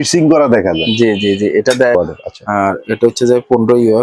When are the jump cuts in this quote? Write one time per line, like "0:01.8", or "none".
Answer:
0:01.9